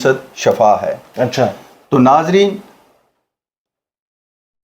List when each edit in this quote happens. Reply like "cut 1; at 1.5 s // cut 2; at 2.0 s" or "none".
none